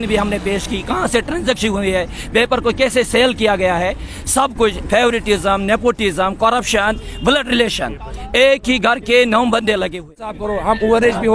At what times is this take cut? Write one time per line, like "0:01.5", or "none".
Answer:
0:10.4